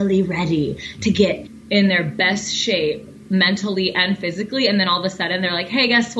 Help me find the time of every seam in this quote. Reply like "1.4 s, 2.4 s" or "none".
1.5 s